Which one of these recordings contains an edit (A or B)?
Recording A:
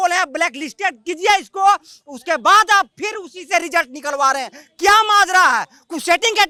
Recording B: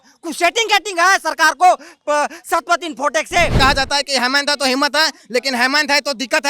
B